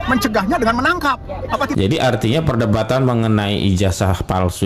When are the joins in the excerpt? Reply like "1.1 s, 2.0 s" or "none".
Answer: 1.7 s